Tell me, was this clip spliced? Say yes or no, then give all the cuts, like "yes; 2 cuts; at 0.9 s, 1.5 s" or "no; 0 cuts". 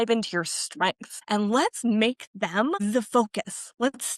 yes; 2 cuts; at 1.1 s, 2.8 s